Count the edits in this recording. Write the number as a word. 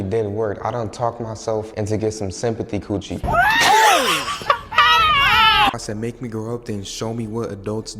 one